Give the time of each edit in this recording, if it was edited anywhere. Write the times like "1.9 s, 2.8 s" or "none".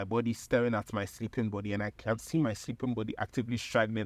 none